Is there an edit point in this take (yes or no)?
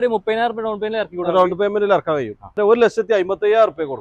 yes